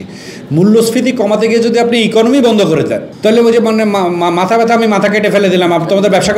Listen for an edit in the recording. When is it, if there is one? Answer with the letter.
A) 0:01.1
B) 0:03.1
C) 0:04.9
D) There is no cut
B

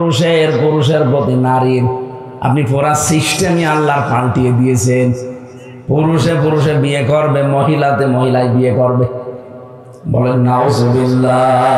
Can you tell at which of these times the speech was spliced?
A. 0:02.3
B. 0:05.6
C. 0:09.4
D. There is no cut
D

